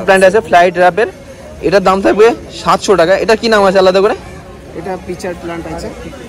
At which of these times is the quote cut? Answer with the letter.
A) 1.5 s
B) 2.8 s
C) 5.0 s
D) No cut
D